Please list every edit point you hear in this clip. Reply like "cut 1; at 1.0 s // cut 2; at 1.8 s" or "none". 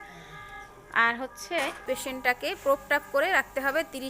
cut 1; at 1.8 s